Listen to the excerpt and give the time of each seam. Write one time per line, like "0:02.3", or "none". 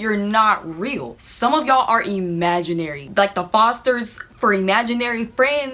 0:03.0

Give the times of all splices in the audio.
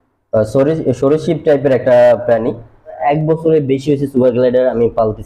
0:03.0

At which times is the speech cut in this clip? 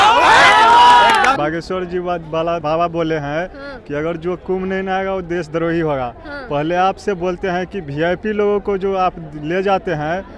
0:01.4
0:02.6

